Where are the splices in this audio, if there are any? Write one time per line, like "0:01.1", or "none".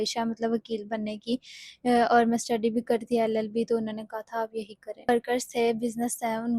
0:05.1

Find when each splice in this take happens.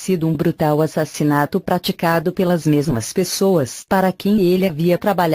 none

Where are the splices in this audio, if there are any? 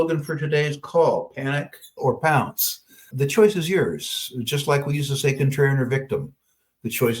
0:02.0
0:03.1

